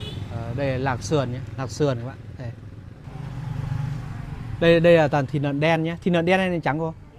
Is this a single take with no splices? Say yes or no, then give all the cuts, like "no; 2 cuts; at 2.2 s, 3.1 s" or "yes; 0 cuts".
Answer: no; 1 cut; at 3.0 s